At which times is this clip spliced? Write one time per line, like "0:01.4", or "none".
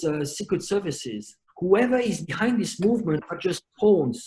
0:01.5